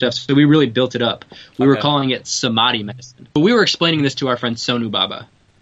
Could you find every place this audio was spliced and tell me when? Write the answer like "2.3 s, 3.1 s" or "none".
3.4 s